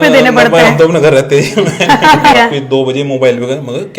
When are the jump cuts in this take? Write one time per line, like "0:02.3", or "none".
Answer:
0:02.4